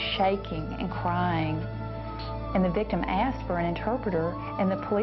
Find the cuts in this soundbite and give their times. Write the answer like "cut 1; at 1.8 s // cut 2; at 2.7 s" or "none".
none